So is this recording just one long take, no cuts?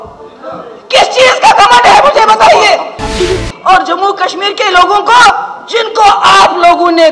no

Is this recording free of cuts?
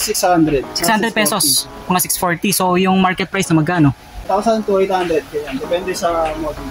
no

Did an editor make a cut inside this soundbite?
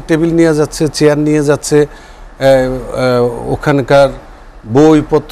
no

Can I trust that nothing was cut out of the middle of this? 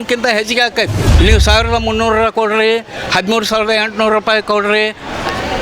no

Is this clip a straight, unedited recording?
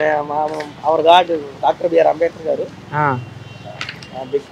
yes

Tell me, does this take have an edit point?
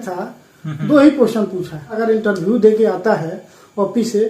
yes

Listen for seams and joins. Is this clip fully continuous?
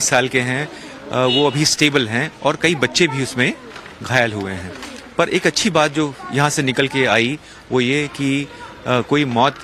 no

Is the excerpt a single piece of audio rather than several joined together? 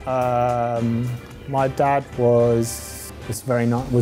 yes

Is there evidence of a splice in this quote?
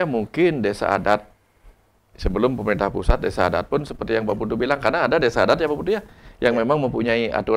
no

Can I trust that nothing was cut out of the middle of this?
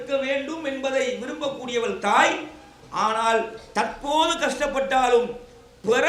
yes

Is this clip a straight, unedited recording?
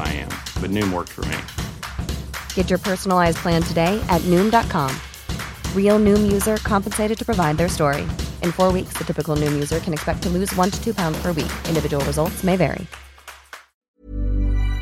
no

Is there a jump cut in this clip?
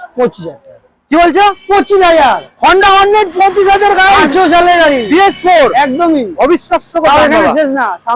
no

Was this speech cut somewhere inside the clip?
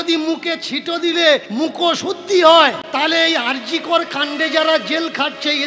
yes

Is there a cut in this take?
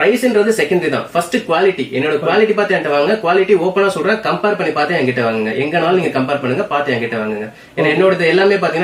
no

